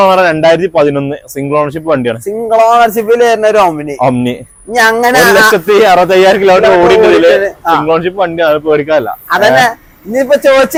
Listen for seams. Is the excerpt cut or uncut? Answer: uncut